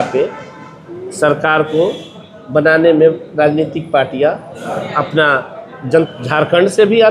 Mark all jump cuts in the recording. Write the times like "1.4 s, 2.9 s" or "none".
6.1 s